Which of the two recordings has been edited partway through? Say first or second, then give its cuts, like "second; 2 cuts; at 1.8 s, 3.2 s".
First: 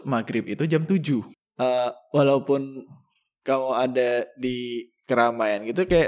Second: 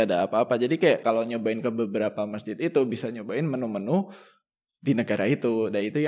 first; 1 cut; at 1.4 s